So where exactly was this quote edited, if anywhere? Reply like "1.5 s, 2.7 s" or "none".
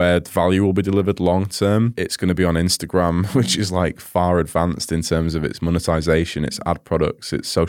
2.0 s, 3.3 s